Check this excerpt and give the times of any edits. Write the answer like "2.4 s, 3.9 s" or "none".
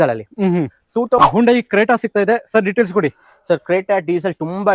1.2 s

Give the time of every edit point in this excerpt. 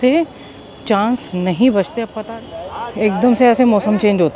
2.1 s

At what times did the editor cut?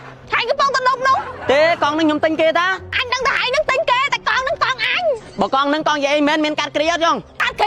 none

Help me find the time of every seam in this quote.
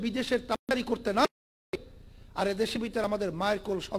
none

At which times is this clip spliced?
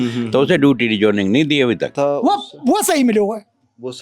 1.9 s

